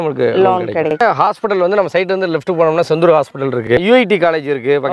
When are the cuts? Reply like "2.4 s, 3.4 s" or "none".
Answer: 1.0 s, 3.7 s

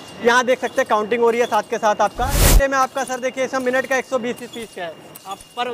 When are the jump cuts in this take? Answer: 2.5 s

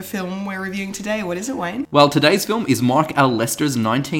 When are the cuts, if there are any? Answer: 1.8 s

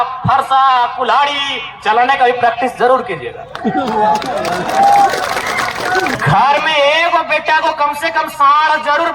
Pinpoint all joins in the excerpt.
6.2 s

